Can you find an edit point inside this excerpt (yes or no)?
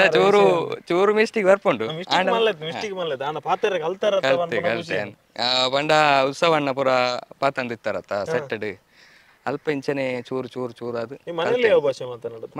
no